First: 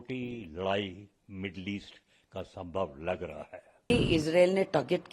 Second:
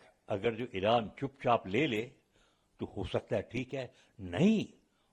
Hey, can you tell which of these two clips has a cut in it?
first; 1 cut; at 3.7 s

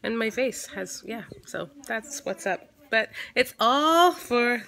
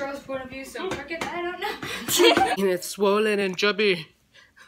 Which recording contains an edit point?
second; 1 cut; at 2.6 s

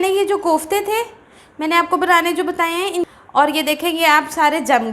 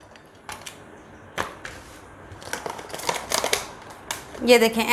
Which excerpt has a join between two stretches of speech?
first; 1 cut; at 3.1 s

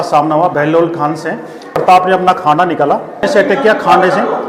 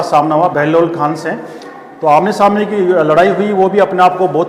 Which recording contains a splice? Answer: first; 2 cuts; at 1.8 s, 3.2 s

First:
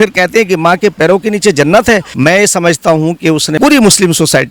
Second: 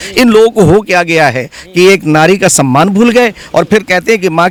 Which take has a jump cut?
first; 2 cuts; at 2.1 s, 3.5 s

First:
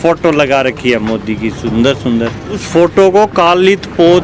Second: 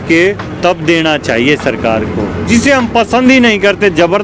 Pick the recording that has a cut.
first; 1 cut; at 2.6 s

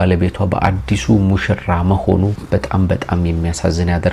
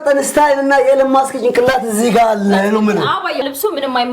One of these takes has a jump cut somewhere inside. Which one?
second; 1 cut; at 3.0 s

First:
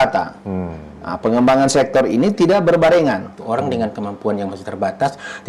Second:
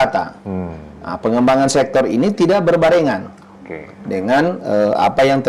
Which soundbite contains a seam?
first; 1 cut; at 3.3 s

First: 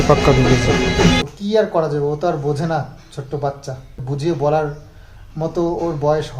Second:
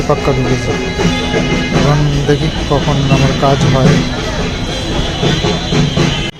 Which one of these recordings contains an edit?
first; 2 cuts; at 1.2 s, 4.0 s

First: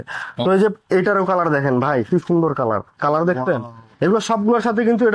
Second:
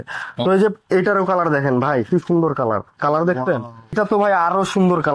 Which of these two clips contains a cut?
second; 1 cut; at 3.9 s

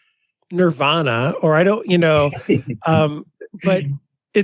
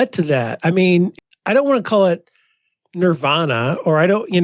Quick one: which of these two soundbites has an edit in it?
second; 1 cut; at 1.1 s

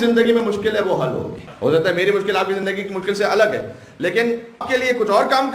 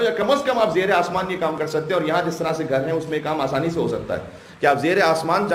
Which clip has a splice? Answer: first; 2 cuts; at 1.4 s, 4.6 s

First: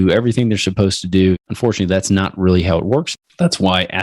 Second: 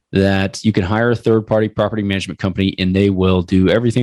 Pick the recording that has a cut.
first; 2 cuts; at 1.5 s, 3.1 s

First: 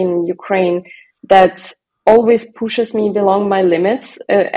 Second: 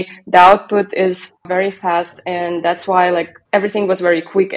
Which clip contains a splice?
second; 2 cuts; at 1.5 s, 3.4 s

